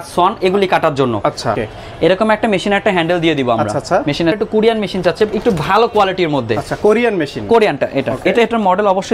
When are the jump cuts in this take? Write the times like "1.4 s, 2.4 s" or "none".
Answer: 1.6 s, 4.4 s